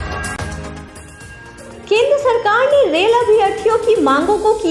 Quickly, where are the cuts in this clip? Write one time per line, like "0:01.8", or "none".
0:01.2